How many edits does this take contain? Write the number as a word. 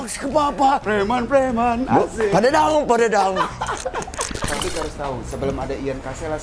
one